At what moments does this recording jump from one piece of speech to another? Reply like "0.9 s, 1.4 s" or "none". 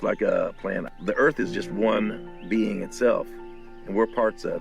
0.9 s

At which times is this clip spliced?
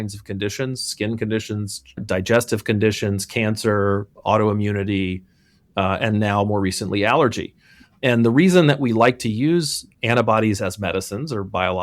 2.0 s

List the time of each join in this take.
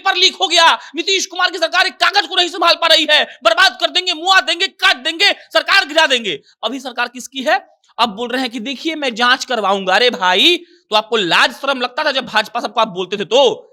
none

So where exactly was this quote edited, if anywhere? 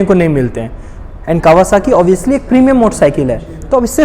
none

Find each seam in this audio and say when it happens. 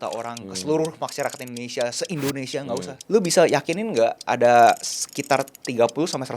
2.9 s

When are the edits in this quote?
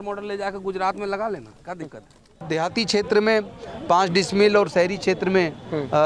2.4 s

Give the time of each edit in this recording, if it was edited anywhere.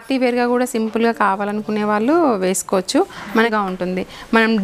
3.5 s

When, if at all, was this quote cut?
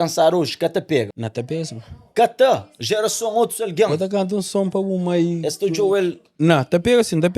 1.2 s

